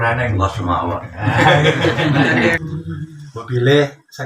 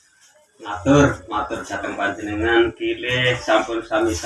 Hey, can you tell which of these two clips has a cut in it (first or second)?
first